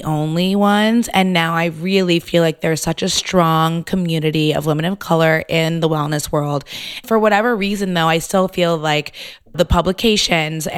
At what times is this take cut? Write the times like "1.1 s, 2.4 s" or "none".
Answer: 9.5 s